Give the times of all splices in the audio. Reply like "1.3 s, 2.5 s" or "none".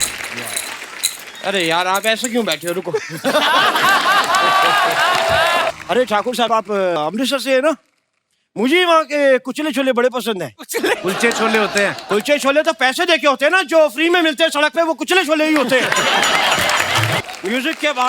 5.7 s, 17.2 s